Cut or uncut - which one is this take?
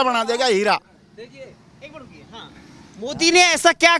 uncut